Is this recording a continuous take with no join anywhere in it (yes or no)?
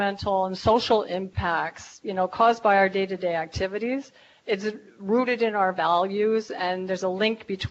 yes